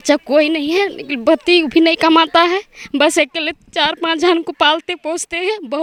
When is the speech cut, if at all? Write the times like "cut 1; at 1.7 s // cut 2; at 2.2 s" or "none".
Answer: none